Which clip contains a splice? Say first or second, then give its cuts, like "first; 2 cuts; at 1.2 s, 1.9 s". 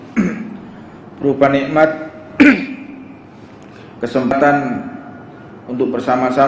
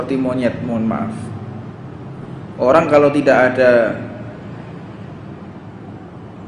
first; 1 cut; at 4.3 s